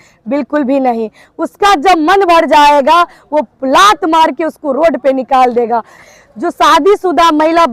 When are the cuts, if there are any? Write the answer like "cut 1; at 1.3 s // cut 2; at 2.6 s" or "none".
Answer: cut 1; at 6.0 s

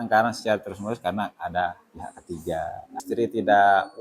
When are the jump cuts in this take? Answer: cut 1; at 3.0 s

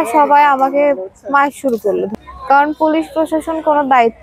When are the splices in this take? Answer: cut 1; at 2.1 s

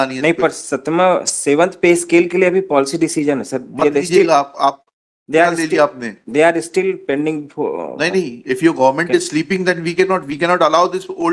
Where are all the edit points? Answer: none

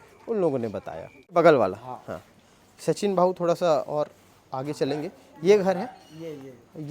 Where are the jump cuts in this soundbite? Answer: cut 1; at 1.3 s

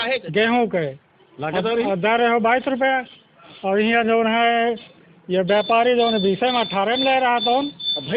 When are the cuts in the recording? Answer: none

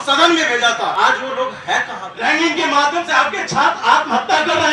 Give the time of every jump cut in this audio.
cut 1; at 0.9 s // cut 2; at 2.0 s

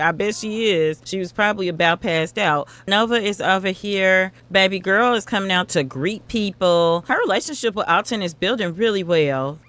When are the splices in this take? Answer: none

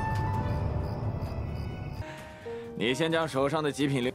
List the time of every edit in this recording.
cut 1; at 2.0 s

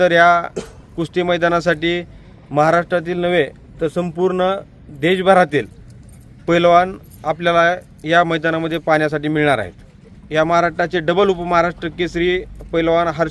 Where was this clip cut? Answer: cut 1; at 10.2 s

